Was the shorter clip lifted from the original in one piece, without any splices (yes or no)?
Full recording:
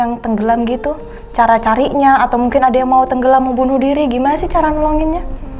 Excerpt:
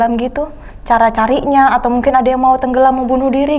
yes